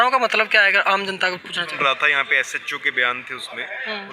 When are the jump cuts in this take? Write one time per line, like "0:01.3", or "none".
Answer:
0:01.7